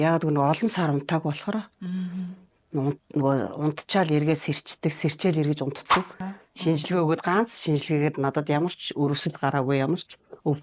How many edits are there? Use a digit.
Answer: 1